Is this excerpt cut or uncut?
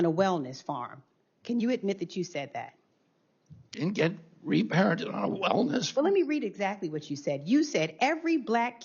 uncut